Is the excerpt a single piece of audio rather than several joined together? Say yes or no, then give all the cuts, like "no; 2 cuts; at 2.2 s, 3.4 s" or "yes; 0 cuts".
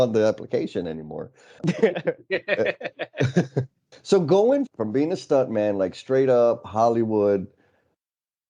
no; 3 cuts; at 1.6 s, 3.8 s, 4.7 s